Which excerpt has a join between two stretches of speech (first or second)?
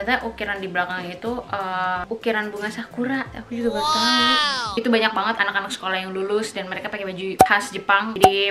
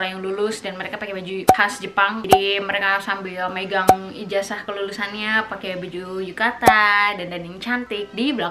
first